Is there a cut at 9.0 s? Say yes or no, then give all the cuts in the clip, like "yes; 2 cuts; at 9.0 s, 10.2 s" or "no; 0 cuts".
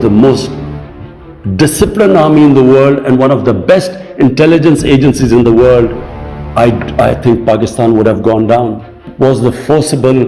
yes; 1 cut; at 9.0 s